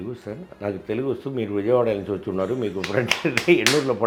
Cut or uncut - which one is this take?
uncut